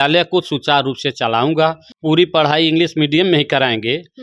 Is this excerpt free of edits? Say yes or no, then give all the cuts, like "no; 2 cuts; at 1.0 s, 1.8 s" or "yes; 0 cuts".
no; 1 cut; at 1.9 s